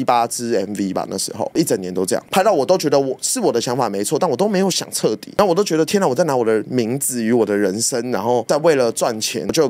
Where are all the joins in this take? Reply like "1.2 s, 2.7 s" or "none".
none